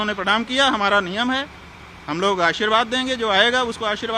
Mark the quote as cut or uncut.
uncut